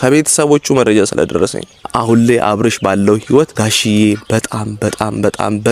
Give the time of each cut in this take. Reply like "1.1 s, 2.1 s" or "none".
1.9 s, 3.5 s